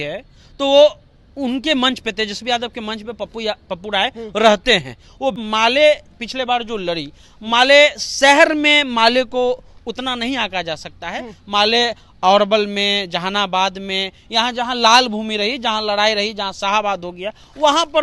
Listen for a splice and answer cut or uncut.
cut